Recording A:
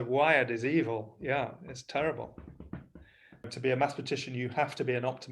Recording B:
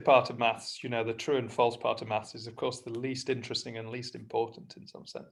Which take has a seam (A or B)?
A